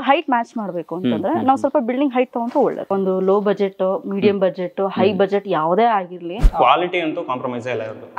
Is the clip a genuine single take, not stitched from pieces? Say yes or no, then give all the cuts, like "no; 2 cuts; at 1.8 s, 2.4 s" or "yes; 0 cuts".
no; 2 cuts; at 2.9 s, 6.3 s